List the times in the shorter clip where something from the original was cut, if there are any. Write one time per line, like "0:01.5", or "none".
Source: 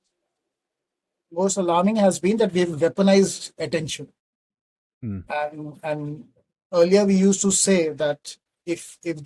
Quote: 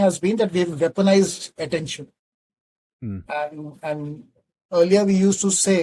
none